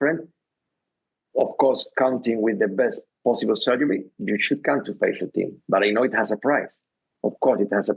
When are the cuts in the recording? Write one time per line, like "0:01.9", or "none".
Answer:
none